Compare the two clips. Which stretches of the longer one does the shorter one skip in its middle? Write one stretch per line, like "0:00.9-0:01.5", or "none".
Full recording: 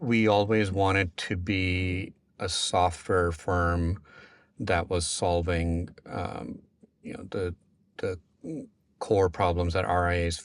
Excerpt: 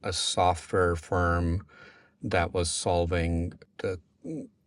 0:06.0-0:07.8